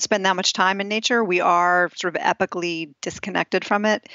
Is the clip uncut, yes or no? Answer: yes